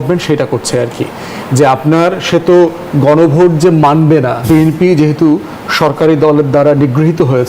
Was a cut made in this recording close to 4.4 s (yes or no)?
yes